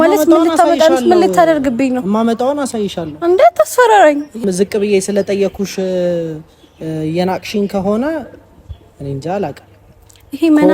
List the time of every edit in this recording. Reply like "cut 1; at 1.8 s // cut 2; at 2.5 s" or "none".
cut 1; at 4.4 s